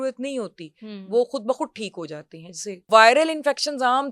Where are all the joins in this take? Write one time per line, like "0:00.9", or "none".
0:02.9

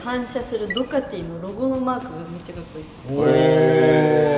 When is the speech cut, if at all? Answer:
none

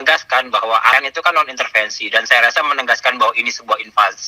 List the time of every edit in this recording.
0:00.9

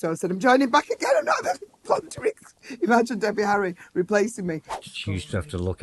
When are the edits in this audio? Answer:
0:04.7

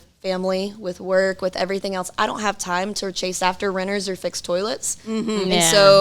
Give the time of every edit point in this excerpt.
none

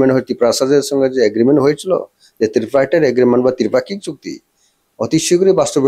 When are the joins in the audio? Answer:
none

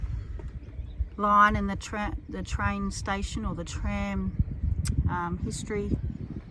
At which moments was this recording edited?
none

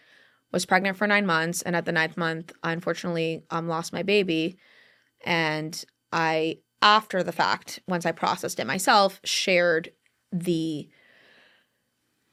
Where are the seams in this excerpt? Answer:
none

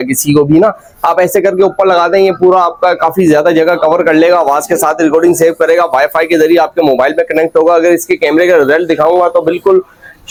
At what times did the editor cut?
none

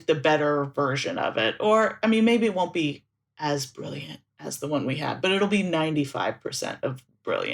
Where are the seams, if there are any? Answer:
none

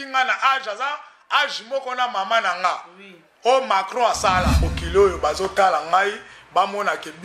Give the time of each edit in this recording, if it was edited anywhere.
0:04.7

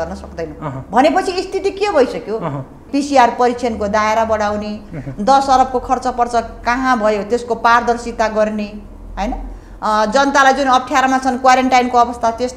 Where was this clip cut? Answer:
0:02.8

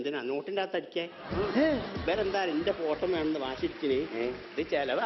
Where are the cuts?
0:02.0

